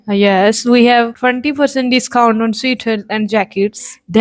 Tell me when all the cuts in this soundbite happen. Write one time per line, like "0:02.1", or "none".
0:01.1